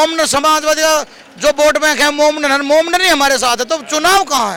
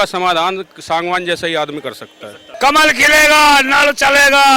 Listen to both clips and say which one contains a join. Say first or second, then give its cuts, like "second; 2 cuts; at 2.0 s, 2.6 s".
second; 1 cut; at 2.5 s